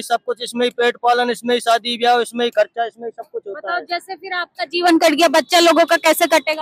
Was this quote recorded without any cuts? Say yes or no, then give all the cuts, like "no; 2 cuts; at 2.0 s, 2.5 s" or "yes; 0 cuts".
yes; 0 cuts